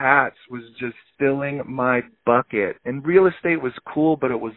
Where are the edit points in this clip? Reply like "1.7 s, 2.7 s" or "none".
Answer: 1.0 s